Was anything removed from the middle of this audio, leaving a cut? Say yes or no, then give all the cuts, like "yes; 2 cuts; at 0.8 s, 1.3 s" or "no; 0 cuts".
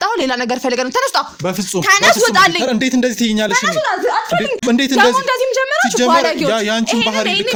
no; 0 cuts